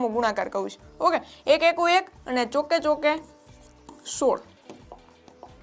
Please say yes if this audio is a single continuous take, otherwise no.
yes